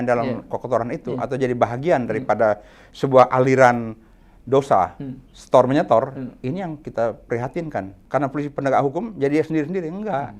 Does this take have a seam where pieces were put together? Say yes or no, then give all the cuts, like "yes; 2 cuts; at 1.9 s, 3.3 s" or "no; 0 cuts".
yes; 1 cut; at 8.0 s